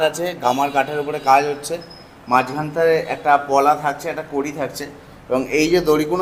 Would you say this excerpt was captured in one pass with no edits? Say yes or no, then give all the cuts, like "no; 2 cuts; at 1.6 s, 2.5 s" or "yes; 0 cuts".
yes; 0 cuts